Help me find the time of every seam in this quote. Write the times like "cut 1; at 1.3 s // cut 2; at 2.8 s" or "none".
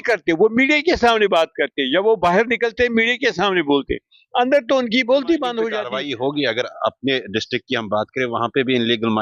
cut 1; at 5.8 s